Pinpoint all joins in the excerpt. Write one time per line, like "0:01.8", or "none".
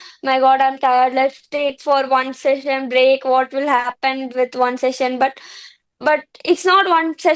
none